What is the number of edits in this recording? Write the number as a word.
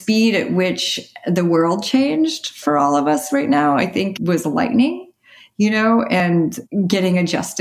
three